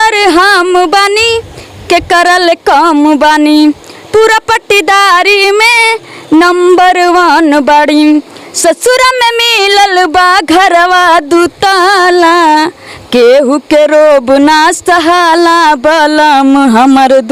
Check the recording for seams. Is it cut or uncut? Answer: uncut